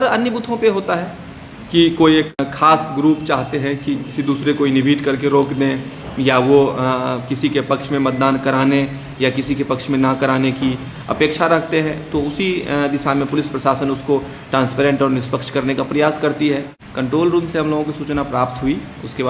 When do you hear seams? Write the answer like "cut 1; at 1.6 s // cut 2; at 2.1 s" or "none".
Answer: cut 1; at 2.4 s // cut 2; at 16.8 s